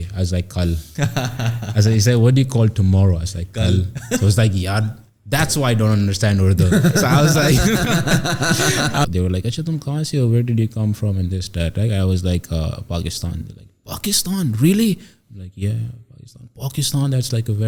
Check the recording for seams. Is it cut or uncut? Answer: cut